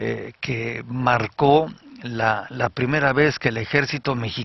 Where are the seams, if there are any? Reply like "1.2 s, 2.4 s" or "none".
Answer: 3.1 s